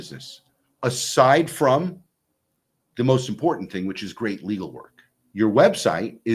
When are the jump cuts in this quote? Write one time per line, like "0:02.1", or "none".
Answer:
0:05.2